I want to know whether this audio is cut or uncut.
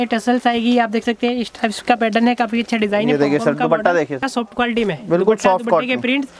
cut